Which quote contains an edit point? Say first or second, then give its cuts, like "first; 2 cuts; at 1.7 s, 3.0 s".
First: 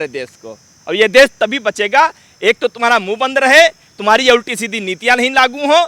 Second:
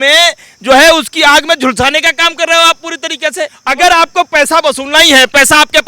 second; 1 cut; at 3.6 s